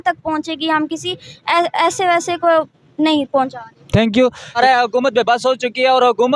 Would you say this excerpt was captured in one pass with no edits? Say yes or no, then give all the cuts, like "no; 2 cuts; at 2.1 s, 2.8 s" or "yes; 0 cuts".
no; 1 cut; at 4.6 s